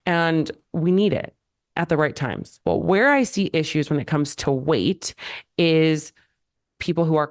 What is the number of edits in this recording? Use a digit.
1